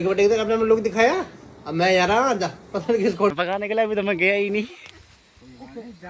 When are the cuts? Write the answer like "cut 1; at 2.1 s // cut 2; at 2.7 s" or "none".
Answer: cut 1; at 3.3 s